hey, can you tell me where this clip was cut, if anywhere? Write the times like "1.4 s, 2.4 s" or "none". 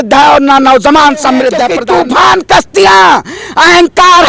1.7 s